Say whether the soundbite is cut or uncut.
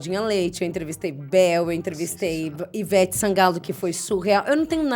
uncut